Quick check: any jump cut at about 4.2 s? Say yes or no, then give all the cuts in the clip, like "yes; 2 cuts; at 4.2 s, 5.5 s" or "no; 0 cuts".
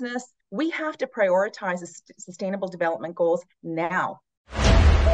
yes; 1 cut; at 4.2 s